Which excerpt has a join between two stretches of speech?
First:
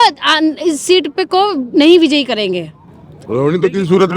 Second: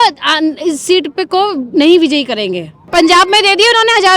second; 1 cut; at 2.8 s

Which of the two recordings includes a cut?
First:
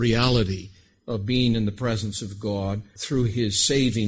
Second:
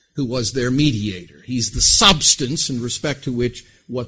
first; 1 cut; at 2.9 s

